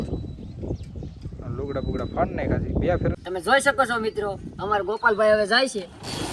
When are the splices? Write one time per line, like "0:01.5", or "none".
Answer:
0:03.2